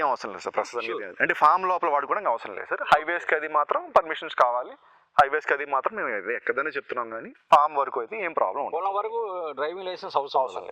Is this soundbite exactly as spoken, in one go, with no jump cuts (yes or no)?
yes